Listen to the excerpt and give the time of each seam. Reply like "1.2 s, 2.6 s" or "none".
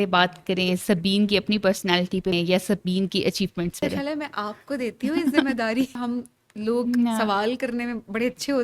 2.3 s, 3.8 s, 6.0 s